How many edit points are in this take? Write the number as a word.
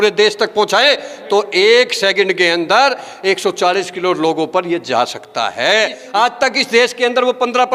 one